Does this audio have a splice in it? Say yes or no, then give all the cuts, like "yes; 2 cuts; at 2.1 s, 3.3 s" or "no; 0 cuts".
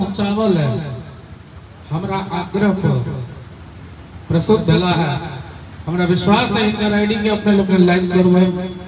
no; 0 cuts